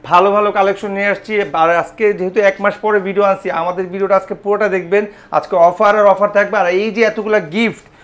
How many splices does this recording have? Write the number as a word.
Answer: zero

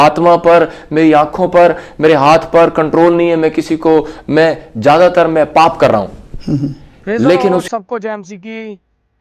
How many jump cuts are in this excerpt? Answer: one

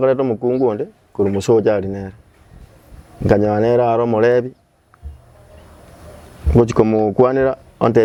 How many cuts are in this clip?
zero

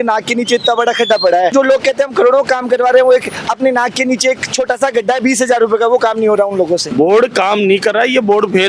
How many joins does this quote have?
two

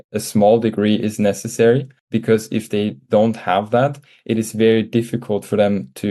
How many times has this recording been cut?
one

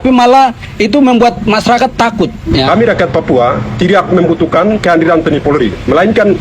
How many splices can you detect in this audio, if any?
one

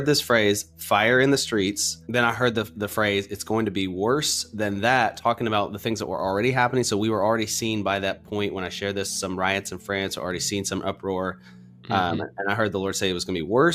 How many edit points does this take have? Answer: zero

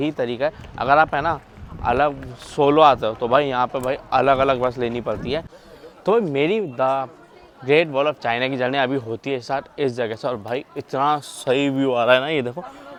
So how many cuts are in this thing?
zero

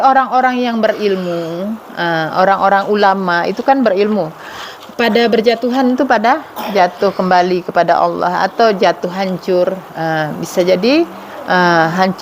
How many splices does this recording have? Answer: zero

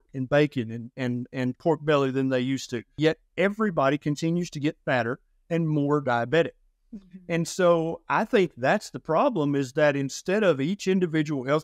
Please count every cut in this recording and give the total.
one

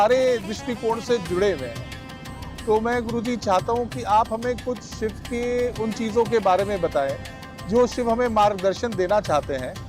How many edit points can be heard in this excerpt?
zero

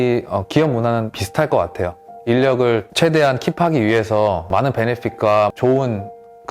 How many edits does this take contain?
three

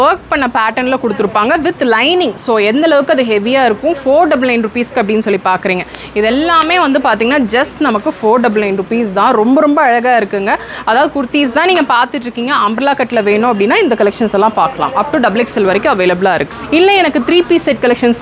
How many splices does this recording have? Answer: one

